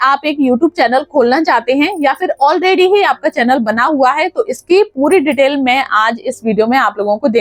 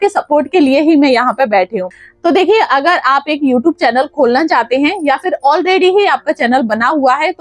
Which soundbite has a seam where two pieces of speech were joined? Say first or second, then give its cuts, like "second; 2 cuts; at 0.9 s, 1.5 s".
second; 1 cut; at 1.9 s